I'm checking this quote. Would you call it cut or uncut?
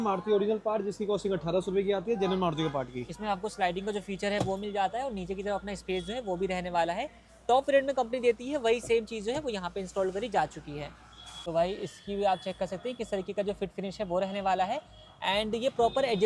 uncut